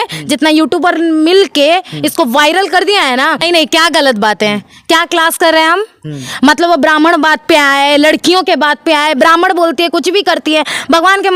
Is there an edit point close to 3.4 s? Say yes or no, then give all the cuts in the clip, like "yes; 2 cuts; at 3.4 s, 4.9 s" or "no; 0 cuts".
yes; 1 cut; at 3.4 s